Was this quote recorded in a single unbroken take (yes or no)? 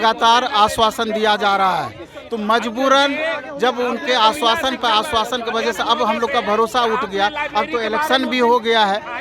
yes